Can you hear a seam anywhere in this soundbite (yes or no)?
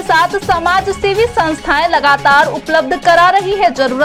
no